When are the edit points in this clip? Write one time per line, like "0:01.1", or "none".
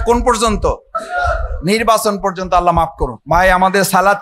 0:01.0
0:03.1